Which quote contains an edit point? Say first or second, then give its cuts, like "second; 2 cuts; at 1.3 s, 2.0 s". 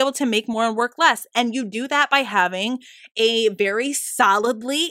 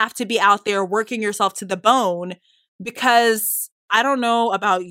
second; 1 cut; at 3.9 s